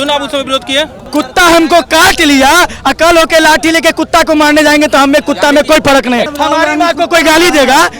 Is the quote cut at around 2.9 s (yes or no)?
no